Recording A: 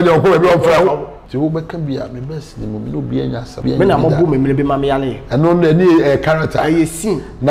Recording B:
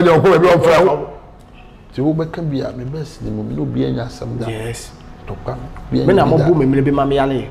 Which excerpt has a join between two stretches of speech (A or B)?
A